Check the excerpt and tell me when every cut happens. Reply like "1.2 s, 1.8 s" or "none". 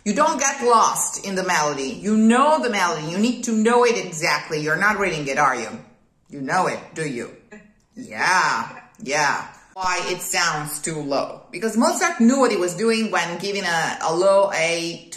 9.8 s